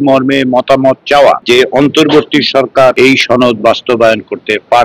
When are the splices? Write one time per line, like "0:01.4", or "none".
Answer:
0:01.4
0:02.9